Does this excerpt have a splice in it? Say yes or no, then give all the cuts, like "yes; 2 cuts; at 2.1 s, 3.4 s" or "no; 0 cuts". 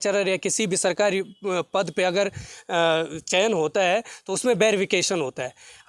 no; 0 cuts